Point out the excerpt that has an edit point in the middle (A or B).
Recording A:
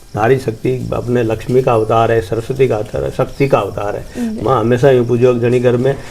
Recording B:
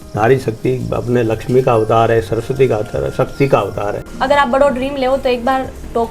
B